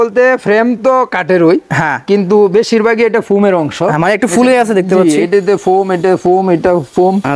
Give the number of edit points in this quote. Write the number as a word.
zero